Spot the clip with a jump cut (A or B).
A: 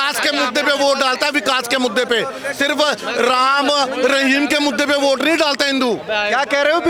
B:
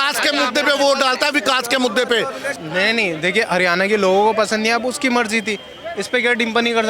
B